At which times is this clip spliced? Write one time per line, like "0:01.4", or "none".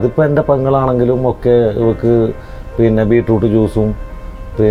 none